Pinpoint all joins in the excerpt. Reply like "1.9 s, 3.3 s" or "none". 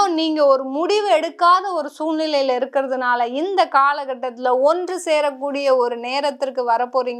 none